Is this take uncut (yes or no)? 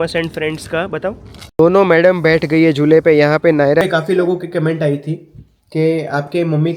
no